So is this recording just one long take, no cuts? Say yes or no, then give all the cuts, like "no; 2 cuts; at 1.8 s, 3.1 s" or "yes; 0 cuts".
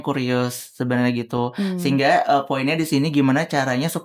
yes; 0 cuts